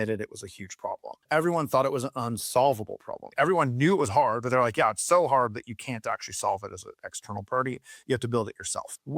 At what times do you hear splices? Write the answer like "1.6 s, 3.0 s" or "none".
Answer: 1.1 s